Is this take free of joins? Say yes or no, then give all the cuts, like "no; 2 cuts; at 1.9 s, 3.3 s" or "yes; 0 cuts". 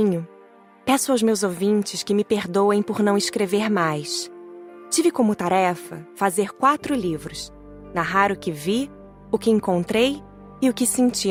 yes; 0 cuts